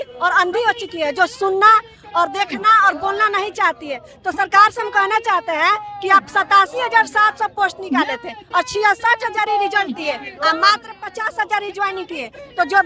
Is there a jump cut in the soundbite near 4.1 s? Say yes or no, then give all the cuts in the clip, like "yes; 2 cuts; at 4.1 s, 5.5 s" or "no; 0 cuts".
no; 0 cuts